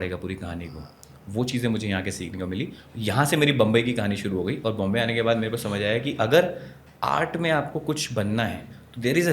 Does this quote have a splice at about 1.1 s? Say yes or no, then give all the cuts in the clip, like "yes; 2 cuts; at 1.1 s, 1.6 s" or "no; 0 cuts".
no; 0 cuts